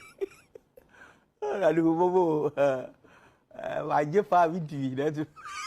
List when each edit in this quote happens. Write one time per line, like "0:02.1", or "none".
0:02.2